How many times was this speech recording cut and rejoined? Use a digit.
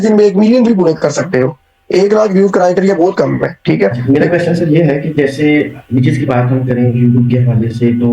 1